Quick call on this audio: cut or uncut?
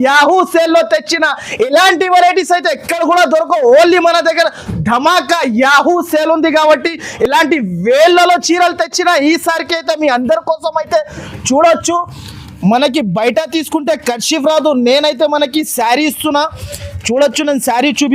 uncut